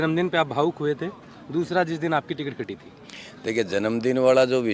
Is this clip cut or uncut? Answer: uncut